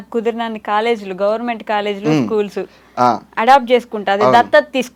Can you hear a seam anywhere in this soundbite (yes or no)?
no